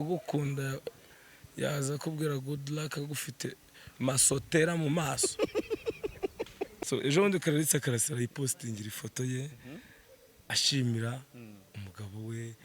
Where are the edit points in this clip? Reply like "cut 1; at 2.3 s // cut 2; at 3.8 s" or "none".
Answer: cut 1; at 6.8 s